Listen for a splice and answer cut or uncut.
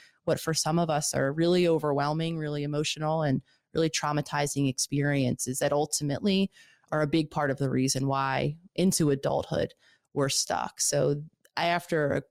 uncut